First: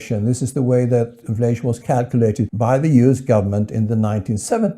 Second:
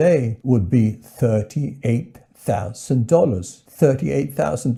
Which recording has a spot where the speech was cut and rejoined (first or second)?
first